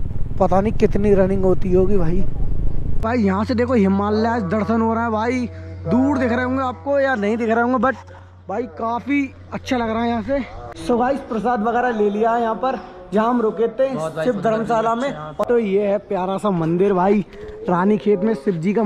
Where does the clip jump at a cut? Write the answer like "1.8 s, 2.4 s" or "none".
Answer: 3.0 s, 10.8 s, 15.3 s